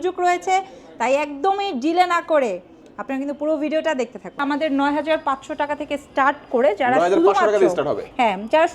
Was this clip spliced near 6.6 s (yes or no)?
no